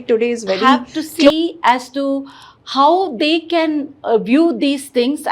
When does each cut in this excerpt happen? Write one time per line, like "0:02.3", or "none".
0:01.3

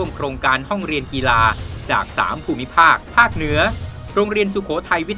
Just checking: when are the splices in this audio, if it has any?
0:03.0

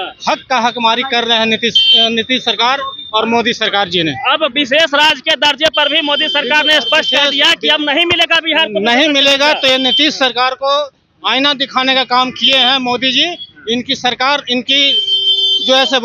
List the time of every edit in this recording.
none

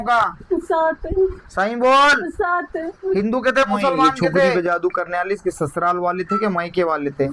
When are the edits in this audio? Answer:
0:04.5

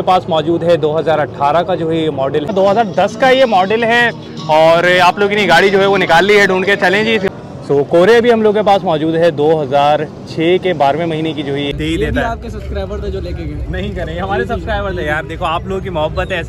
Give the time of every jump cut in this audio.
0:02.5
0:07.3
0:11.7

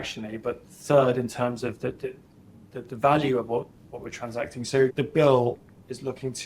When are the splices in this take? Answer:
0:04.9

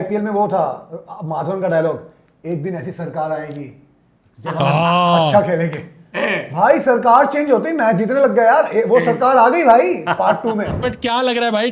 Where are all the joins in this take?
0:10.8

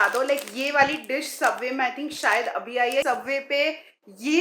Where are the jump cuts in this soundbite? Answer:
0:03.0

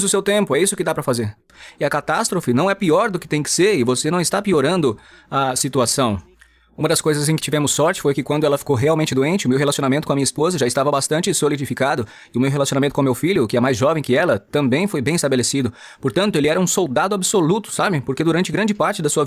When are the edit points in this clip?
0:01.6

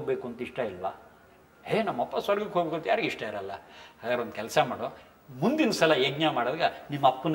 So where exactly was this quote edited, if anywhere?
none

